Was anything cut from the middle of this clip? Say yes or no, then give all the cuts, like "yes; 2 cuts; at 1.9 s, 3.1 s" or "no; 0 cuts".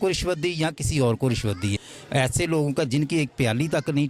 yes; 1 cut; at 1.9 s